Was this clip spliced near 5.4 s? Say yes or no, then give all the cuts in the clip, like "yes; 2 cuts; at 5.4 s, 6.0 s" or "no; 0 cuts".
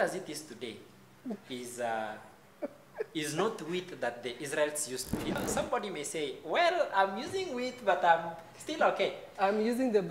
yes; 1 cut; at 5.4 s